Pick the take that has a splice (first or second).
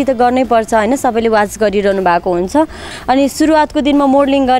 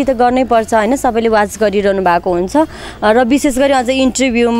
first